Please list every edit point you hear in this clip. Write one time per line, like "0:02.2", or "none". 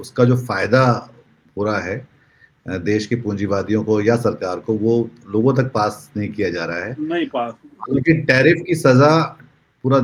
none

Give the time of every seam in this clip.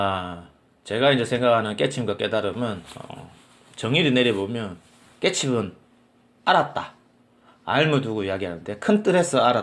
none

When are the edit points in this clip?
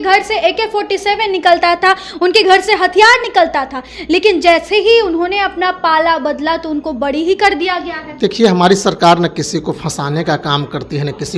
none

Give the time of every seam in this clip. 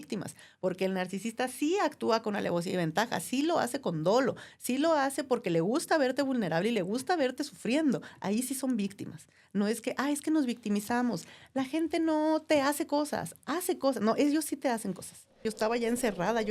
0:15.5

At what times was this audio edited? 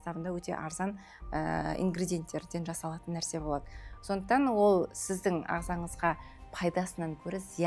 none

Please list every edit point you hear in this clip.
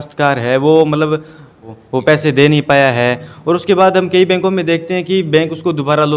0:01.7

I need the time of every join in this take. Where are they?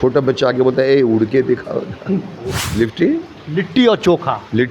0:02.6

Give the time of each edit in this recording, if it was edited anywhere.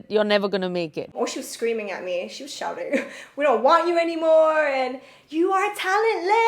0:01.1

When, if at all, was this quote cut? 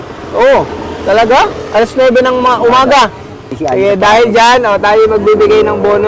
0:03.4

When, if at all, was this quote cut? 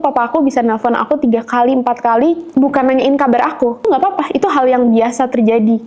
0:03.8

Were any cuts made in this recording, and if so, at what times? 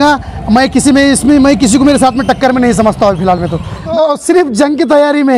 0:03.9

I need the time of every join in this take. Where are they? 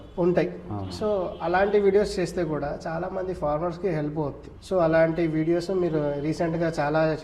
0:04.5

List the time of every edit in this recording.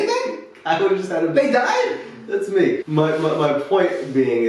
0:02.8

